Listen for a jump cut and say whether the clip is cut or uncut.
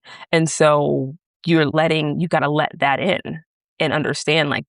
cut